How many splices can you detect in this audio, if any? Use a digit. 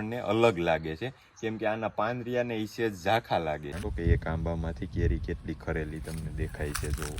1